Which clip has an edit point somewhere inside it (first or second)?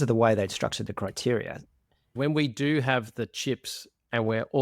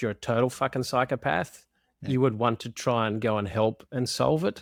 first